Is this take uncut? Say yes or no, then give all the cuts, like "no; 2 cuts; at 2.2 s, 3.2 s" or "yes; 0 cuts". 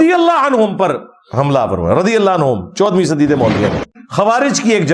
no; 1 cut; at 4.0 s